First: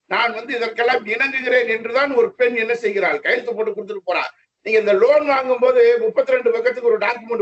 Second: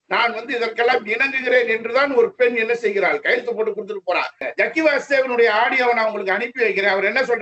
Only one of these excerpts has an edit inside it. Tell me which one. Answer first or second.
second